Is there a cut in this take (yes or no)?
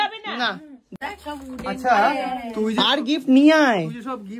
yes